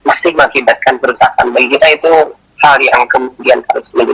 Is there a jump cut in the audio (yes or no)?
yes